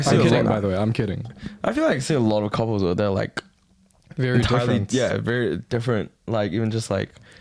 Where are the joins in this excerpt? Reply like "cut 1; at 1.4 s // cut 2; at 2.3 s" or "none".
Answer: none